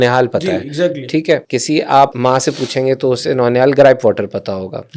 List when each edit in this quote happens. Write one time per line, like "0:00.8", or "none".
0:01.4
0:02.1